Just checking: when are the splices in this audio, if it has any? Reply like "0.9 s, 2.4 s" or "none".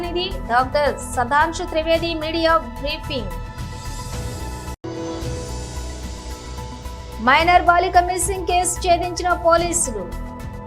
3.3 s, 4.8 s, 7.2 s